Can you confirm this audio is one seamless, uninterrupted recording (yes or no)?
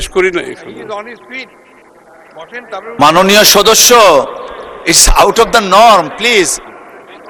yes